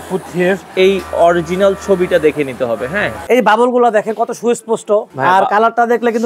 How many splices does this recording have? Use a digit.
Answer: 2